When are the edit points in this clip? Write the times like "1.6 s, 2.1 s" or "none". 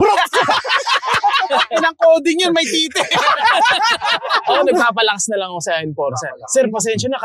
1.5 s, 4.4 s